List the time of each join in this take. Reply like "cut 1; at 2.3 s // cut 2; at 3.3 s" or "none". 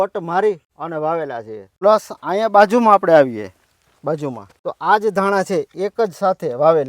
cut 1; at 1.3 s // cut 2; at 4.5 s